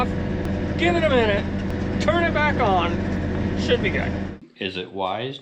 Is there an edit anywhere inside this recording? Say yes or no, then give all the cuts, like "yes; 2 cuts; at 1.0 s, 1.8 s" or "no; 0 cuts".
yes; 1 cut; at 4.3 s